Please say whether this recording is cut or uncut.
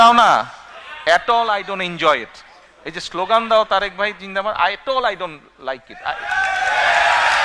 uncut